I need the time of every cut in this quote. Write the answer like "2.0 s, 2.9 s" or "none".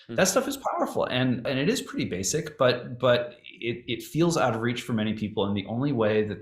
1.4 s